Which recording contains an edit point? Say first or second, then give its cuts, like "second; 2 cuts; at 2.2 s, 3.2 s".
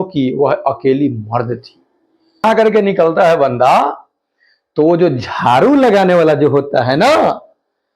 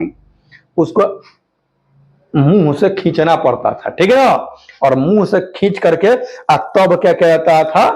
first; 1 cut; at 2.4 s